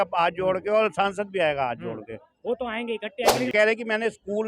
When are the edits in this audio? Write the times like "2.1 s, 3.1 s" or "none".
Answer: 3.5 s